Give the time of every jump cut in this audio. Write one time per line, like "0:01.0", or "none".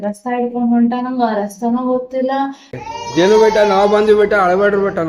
0:02.8